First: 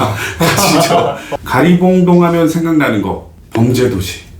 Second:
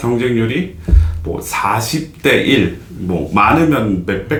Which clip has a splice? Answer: first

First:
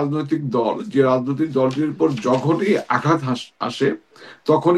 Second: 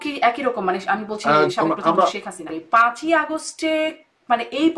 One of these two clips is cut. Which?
second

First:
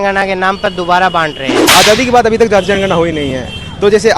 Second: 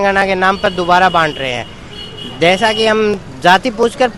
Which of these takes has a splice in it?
first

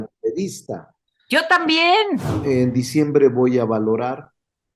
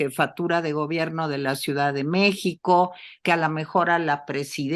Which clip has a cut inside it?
first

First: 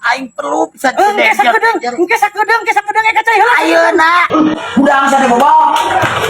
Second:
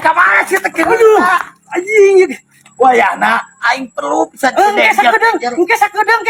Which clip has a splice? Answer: first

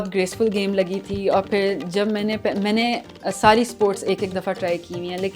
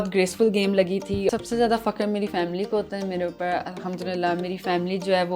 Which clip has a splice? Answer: second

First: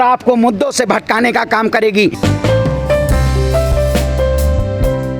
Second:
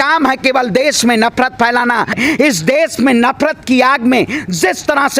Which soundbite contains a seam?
second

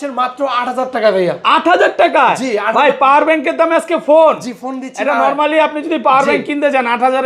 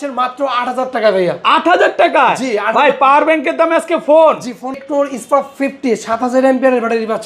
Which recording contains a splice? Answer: second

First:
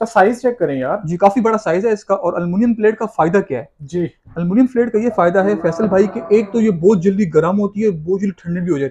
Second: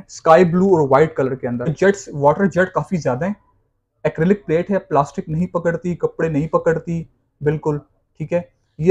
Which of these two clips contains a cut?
second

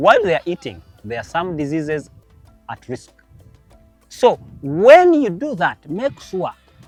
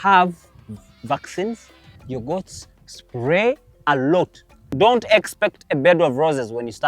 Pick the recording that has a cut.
second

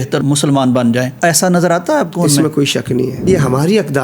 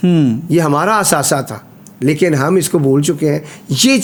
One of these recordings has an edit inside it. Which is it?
first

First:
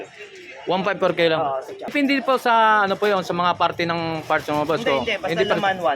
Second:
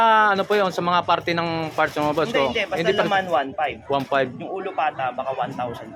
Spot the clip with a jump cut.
first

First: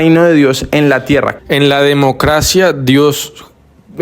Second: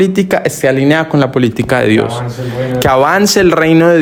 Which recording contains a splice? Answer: first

